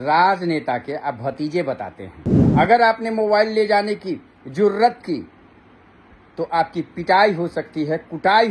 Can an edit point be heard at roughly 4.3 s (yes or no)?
no